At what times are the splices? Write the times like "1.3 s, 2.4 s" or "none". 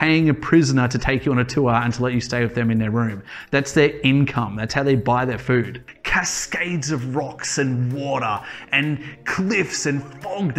5.8 s